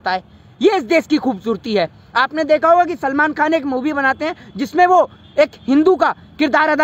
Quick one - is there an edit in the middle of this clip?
no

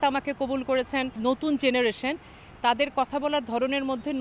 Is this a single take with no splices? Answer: no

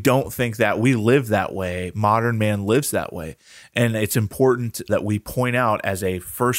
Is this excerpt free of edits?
no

